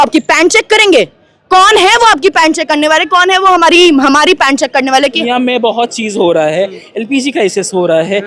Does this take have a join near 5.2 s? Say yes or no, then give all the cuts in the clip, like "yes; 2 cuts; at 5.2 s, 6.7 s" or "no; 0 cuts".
yes; 1 cut; at 5.2 s